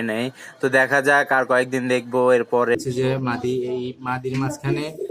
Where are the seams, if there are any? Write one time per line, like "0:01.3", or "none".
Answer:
0:02.8

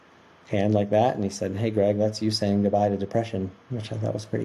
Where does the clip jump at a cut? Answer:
none

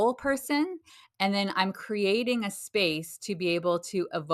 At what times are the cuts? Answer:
none

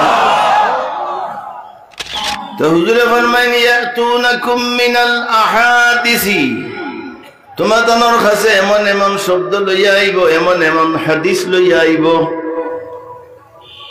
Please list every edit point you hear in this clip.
0:02.1

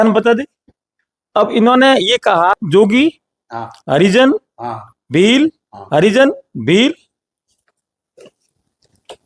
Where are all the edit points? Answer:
0:02.6

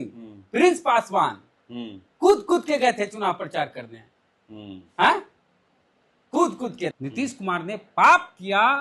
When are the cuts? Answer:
0:06.9

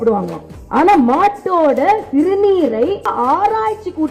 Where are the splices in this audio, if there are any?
0:03.1

